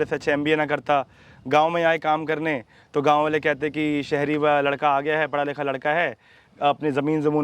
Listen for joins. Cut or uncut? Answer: uncut